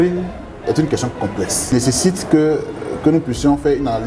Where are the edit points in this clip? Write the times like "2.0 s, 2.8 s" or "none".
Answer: 1.7 s

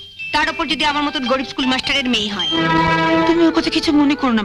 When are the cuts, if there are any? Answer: 3.3 s

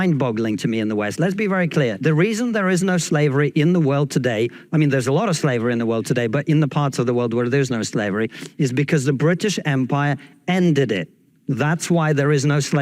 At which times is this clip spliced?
none

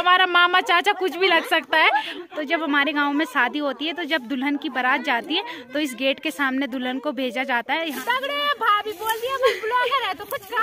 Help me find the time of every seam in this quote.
2.1 s, 8.0 s

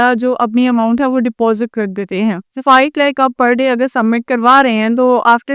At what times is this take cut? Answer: 2.6 s

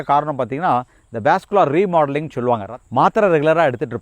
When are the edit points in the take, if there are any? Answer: 2.7 s

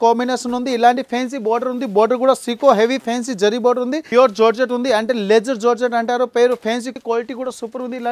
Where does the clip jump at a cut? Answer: 4.1 s, 6.9 s

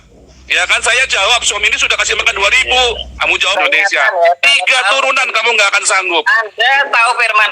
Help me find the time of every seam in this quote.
3.5 s

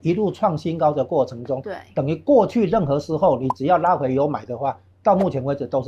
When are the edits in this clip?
none

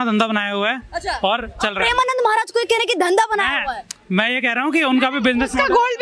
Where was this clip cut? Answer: none

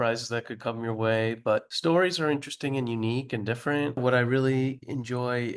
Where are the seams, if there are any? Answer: 1.7 s, 4.0 s

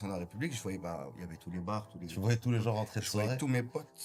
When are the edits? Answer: none

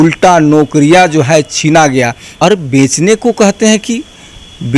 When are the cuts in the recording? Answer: 2.2 s

